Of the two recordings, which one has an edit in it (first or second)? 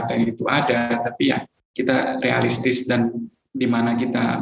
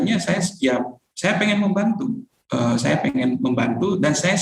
first